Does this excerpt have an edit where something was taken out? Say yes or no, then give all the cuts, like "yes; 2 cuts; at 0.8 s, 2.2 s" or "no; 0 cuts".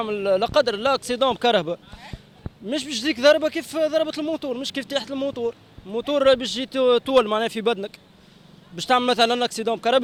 no; 0 cuts